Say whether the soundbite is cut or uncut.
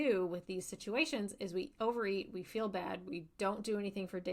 uncut